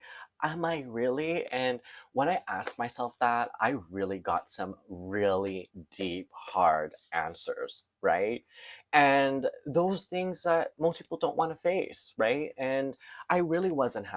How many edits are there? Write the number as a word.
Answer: zero